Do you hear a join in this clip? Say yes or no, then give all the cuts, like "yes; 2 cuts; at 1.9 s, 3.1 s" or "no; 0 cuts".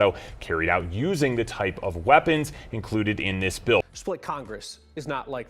yes; 1 cut; at 3.9 s